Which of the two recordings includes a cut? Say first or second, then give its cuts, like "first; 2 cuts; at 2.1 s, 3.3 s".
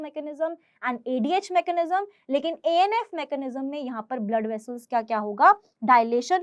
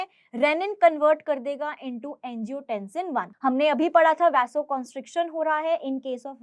second; 1 cut; at 3.3 s